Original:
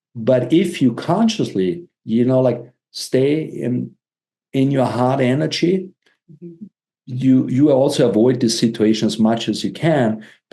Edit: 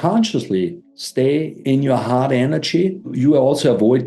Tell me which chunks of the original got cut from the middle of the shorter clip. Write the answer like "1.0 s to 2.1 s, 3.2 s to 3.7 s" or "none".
2.0 s to 3.9 s, 6.0 s to 7.5 s